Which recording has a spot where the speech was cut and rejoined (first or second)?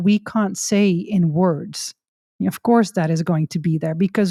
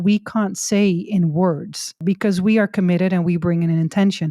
second